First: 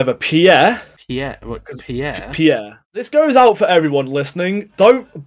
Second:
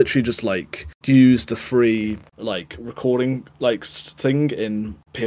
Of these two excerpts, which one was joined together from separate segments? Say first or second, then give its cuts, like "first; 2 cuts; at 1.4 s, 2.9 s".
first; 1 cut; at 2.9 s